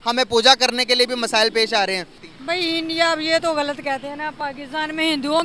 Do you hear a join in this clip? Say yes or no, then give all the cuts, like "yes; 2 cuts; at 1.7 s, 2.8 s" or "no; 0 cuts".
yes; 1 cut; at 2.3 s